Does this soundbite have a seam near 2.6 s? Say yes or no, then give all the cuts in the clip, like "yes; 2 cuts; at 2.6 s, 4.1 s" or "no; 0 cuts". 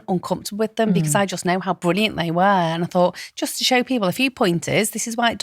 no; 0 cuts